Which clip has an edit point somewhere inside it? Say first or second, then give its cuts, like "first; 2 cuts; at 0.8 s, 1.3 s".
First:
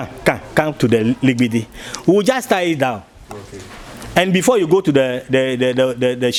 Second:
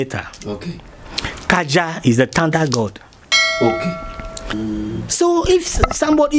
second; 1 cut; at 4.5 s